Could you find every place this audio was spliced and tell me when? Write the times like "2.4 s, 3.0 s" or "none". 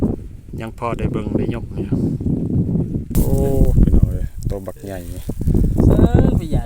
3.1 s